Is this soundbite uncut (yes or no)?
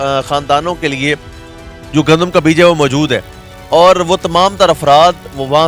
no